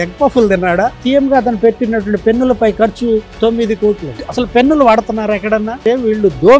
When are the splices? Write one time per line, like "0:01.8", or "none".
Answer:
0:01.0
0:03.3
0:04.2
0:05.8